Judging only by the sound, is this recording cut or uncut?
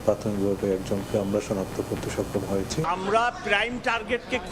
cut